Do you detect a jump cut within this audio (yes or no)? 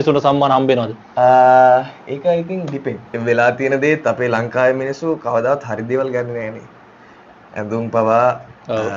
yes